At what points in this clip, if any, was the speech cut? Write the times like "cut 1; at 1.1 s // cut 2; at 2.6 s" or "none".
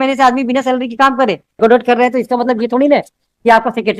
cut 1; at 1.6 s